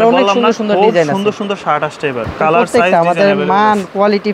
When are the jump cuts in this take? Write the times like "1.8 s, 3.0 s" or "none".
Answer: 2.3 s